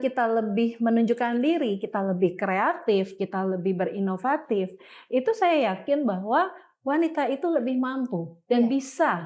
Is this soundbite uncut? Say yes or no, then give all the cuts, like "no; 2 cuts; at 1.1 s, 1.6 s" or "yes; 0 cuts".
yes; 0 cuts